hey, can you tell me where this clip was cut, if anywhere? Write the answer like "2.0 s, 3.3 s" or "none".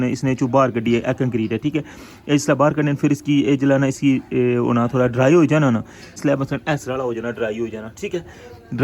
6.2 s